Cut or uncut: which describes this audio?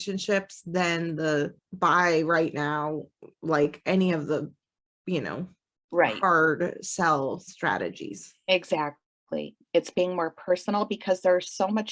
cut